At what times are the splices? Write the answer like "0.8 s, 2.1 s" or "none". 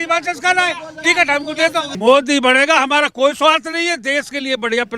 1.9 s